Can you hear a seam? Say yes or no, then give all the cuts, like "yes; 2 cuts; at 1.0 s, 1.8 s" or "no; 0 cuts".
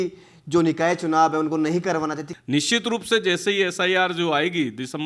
yes; 1 cut; at 2.3 s